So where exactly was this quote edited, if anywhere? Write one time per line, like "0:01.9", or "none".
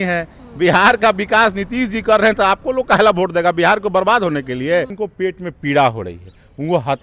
0:05.0